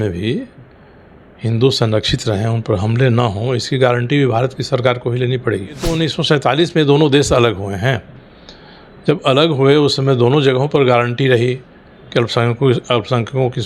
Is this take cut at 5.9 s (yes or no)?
yes